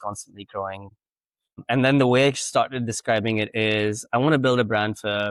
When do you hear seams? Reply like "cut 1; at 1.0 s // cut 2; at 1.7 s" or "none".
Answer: none